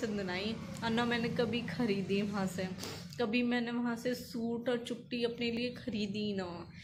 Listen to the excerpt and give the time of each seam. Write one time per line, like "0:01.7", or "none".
none